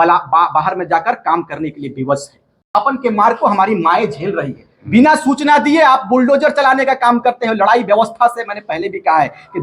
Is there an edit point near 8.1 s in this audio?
no; 1 cut; at 2.7 s

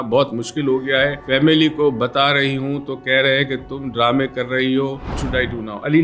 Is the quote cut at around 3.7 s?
no; 2 cuts; at 1.2 s, 5.2 s

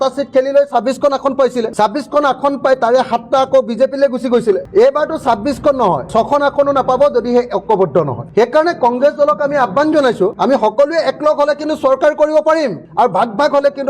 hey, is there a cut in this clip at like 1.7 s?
no; 0 cuts

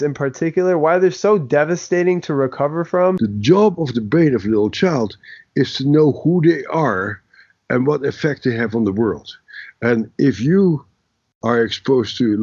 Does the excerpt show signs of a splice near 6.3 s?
no; 1 cut; at 3.2 s

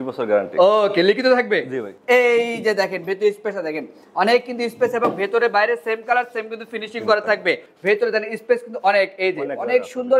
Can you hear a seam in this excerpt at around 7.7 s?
yes; 2 cuts; at 1.9 s, 7.7 s

